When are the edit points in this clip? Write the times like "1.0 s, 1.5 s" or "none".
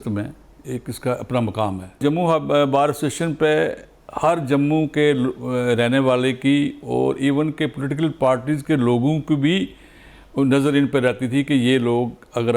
2.0 s